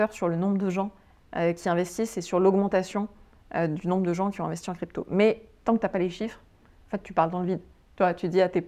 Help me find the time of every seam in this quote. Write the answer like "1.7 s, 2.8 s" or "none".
none